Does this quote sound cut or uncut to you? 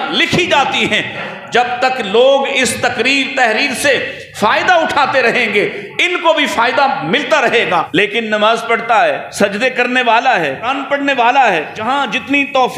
cut